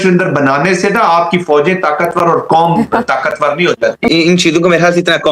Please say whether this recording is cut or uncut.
cut